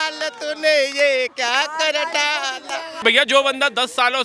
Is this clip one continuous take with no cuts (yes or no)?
no